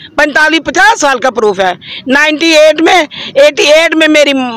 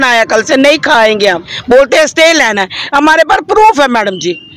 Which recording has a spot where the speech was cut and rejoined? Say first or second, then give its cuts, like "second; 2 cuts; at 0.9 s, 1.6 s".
second; 1 cut; at 1.5 s